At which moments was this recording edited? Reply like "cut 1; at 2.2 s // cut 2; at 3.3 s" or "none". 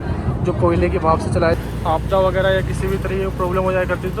cut 1; at 1.6 s